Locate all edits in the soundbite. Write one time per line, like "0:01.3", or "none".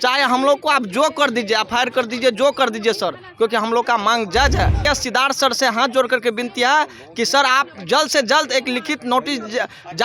0:04.8

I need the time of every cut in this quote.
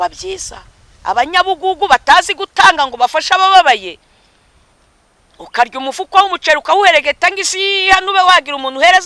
none

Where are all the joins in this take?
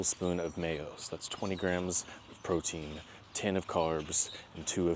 none

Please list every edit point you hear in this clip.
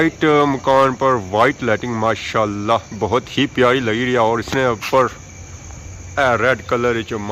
none

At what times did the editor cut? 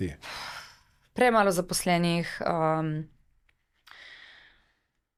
none

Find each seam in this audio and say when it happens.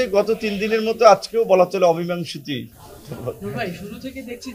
none

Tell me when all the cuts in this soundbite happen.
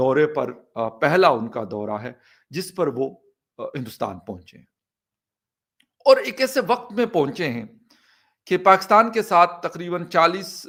none

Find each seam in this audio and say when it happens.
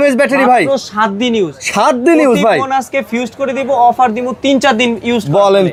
none

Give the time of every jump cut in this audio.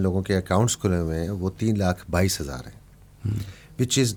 none

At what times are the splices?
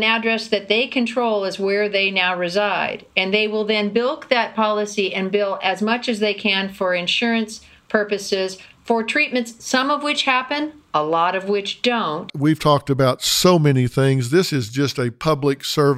0:12.3

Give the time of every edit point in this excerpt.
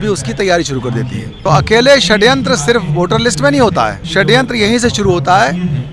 0:01.3
0:04.0

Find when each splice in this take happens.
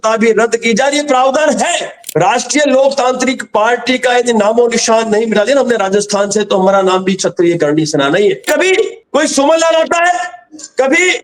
0:02.0
0:08.4

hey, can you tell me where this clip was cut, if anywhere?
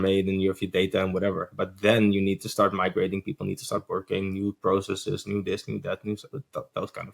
none

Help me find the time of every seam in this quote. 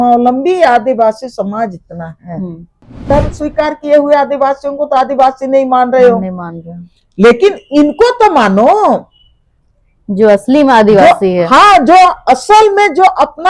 0:03.1

